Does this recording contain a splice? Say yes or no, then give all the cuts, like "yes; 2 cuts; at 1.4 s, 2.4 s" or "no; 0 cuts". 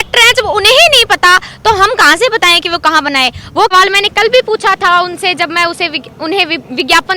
yes; 1 cut; at 3.7 s